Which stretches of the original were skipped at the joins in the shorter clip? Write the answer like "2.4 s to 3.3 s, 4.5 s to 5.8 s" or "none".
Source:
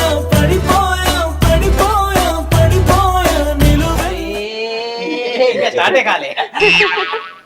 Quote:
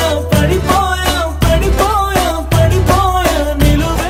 none